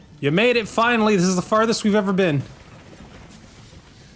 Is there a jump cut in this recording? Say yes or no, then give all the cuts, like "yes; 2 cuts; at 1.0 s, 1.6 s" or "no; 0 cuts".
no; 0 cuts